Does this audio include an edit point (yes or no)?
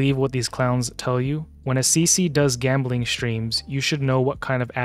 no